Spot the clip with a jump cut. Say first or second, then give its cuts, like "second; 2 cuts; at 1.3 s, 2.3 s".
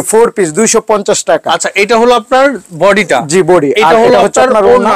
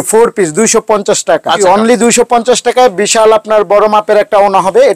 second; 1 cut; at 1.6 s